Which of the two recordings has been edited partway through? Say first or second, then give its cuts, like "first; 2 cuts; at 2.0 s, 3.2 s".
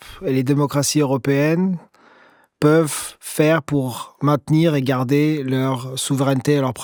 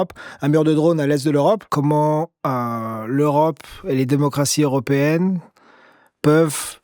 second; 1 cut; at 1.7 s